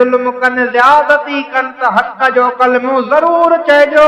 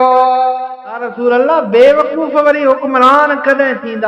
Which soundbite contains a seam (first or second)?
second